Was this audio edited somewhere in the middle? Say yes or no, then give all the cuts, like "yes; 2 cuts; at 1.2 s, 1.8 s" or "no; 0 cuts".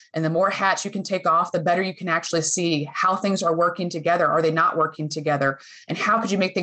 no; 0 cuts